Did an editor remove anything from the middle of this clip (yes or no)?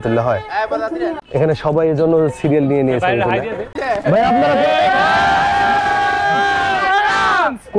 yes